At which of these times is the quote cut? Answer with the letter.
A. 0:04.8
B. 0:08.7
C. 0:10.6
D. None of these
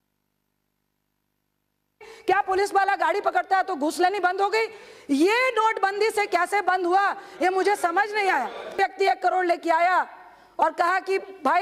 B